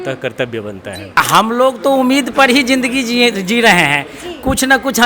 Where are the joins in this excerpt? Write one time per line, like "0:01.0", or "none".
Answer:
0:01.2